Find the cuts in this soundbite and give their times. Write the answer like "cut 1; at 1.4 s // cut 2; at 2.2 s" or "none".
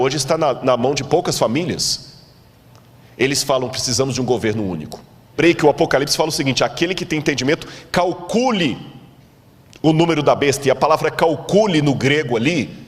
cut 1; at 5.4 s